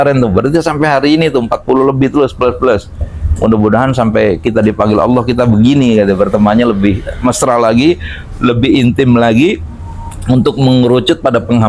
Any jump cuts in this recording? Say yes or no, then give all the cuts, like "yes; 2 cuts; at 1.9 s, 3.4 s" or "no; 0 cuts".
no; 0 cuts